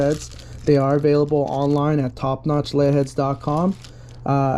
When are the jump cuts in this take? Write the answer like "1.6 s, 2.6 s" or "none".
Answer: none